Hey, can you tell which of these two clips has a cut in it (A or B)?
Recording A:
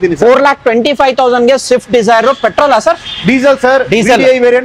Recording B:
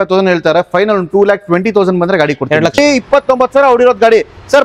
B